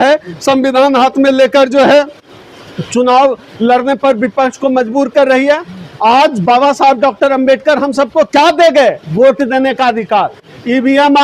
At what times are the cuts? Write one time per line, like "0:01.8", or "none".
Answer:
none